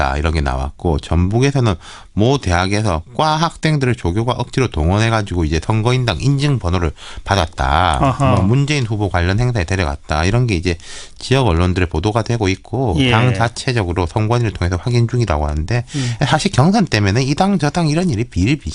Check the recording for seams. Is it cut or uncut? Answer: uncut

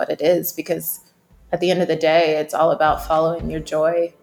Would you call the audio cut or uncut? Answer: uncut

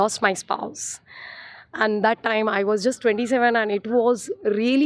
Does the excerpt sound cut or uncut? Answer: uncut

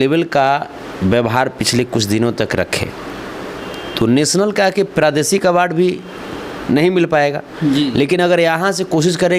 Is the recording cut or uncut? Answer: uncut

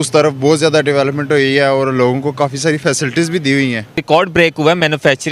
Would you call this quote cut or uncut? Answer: cut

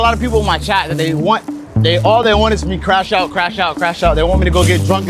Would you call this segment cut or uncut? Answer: uncut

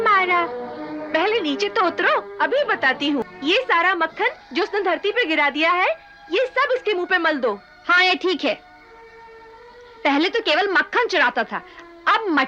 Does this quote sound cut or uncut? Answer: cut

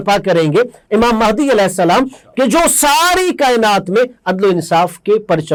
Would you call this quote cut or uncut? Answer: uncut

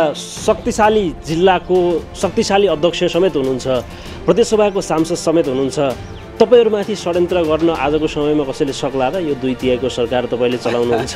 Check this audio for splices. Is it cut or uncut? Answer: uncut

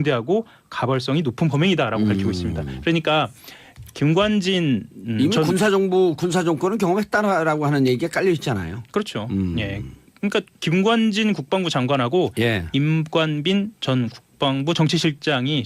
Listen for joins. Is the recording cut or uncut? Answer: cut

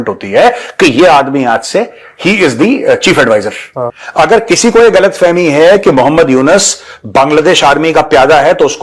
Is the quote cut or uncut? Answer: cut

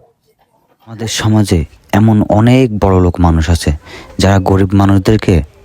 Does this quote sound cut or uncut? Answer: cut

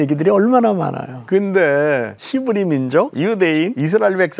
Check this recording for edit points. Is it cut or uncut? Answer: cut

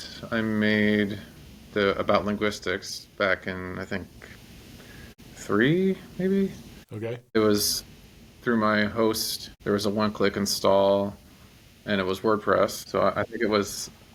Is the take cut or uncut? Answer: uncut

